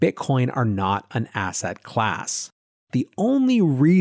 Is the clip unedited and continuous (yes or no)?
no